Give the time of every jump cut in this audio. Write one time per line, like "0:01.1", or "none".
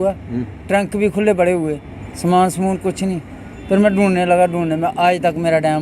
none